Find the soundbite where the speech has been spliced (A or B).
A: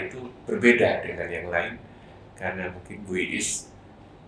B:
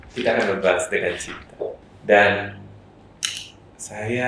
B